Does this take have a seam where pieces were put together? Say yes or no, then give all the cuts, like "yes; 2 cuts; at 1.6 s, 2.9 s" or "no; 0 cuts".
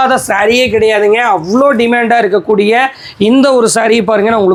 no; 0 cuts